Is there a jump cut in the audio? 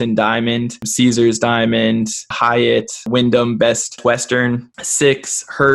yes; 1 cut; at 3.0 s

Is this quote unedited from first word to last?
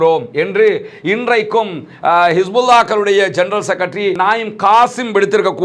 yes; 0 cuts

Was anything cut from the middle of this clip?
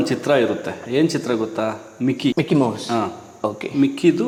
no; 0 cuts

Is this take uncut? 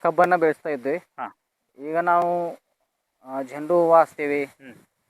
yes; 0 cuts

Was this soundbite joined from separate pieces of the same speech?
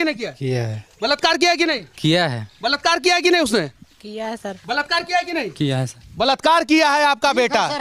no; 0 cuts

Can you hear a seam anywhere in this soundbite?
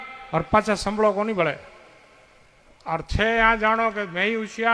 no; 0 cuts

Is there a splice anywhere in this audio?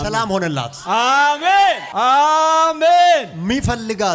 no; 0 cuts

